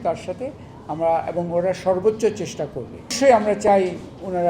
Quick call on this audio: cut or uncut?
cut